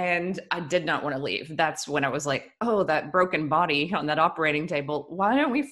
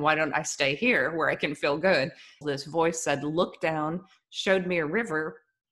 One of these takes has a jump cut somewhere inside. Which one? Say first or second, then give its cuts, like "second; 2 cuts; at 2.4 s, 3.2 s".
second; 1 cut; at 2.4 s